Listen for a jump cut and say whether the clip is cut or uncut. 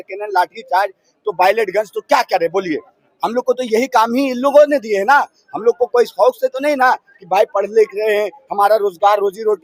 uncut